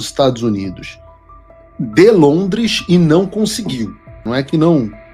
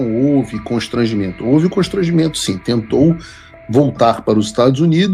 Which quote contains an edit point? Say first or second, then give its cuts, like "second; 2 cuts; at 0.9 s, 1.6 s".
first; 1 cut; at 4.2 s